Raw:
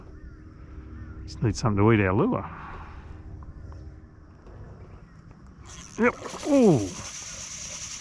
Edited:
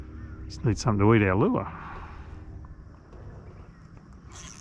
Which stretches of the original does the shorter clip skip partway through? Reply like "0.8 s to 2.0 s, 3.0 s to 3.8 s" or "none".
3.7 s to 4.2 s